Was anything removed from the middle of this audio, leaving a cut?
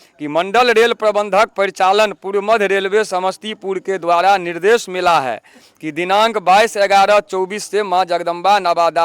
no; 0 cuts

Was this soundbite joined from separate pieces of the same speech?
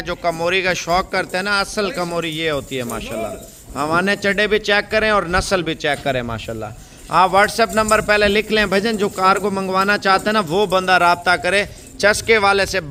no; 0 cuts

